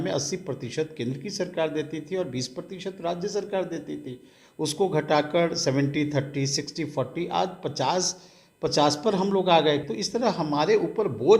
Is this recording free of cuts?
no; 1 cut; at 9.8 s

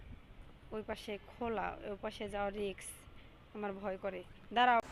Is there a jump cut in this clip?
no; 0 cuts

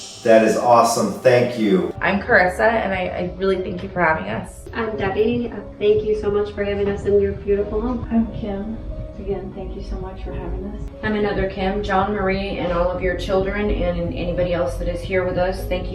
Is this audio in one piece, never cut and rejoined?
no; 2 cuts; at 2.0 s, 4.6 s

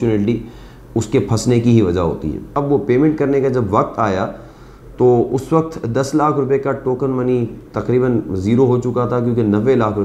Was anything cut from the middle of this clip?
yes; 1 cut; at 2.5 s

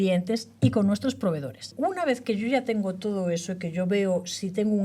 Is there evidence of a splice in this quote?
yes; 1 cut; at 1.7 s

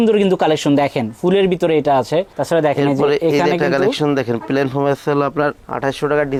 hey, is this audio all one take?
yes; 0 cuts

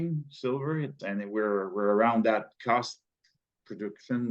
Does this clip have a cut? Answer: yes; 1 cut; at 1.0 s

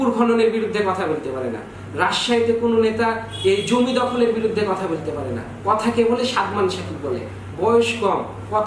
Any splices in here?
no; 0 cuts

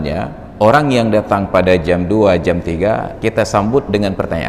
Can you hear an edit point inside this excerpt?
no; 0 cuts

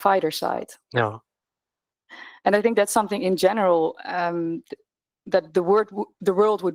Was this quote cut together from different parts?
no; 0 cuts

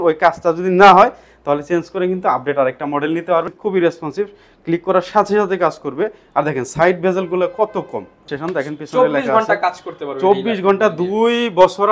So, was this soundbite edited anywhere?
yes; 2 cuts; at 3.5 s, 8.2 s

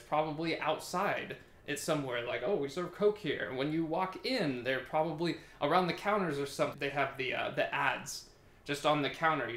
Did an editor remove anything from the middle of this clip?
yes; 1 cut; at 6.8 s

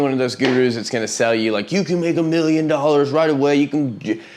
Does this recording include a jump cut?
no; 0 cuts

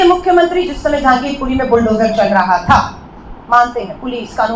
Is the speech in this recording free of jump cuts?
yes; 0 cuts

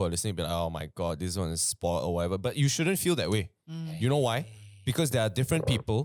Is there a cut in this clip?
no; 0 cuts

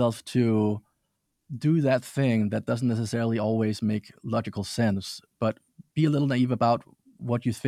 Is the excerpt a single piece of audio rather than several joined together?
yes; 0 cuts

